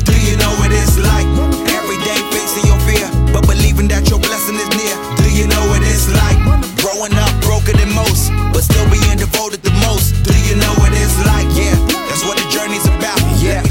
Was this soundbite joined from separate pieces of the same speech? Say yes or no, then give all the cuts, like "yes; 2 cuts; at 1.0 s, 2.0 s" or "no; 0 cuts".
no; 0 cuts